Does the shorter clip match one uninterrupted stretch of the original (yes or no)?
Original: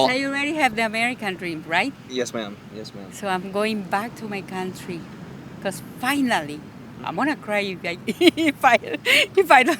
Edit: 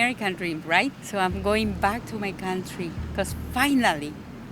no